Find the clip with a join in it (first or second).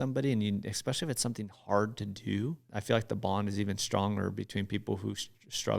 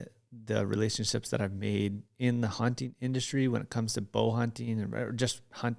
first